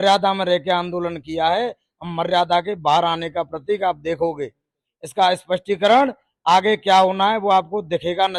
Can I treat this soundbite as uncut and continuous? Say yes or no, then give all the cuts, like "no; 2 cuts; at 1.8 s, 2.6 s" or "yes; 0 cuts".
yes; 0 cuts